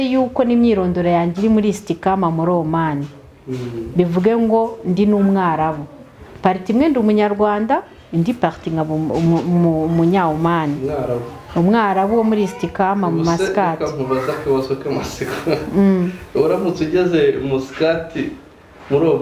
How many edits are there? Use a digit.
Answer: 0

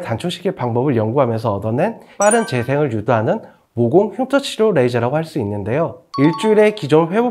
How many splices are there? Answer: 1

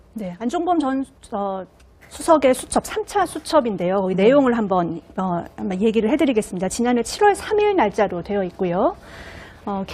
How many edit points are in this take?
1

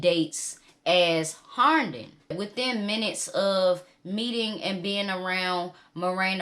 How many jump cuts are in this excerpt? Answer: 1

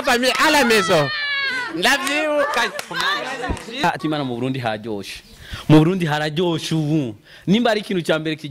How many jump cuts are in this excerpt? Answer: 1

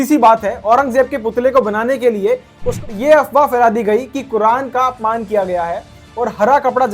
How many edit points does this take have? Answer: 1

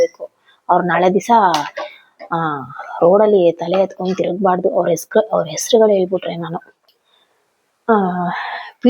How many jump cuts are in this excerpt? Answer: 1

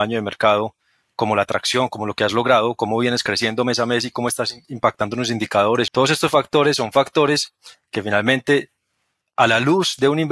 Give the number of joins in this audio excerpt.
1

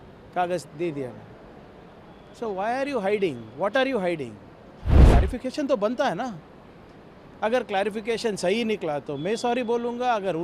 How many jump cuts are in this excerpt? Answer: 1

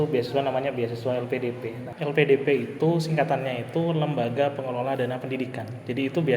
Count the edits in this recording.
1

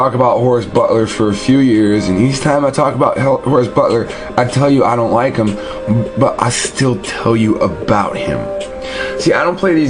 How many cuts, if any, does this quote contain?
1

